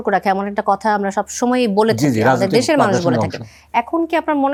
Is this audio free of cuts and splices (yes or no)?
yes